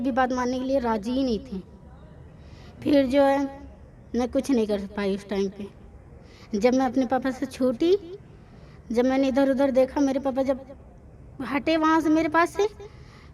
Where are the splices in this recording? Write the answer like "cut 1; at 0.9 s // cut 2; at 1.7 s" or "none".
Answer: none